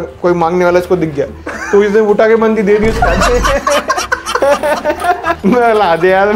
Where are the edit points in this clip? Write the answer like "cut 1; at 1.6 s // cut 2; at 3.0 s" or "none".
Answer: cut 1; at 5.4 s